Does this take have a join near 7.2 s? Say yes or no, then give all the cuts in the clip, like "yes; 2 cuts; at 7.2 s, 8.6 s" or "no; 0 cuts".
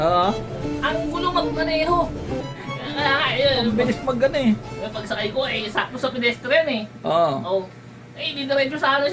no; 1 cut; at 2.4 s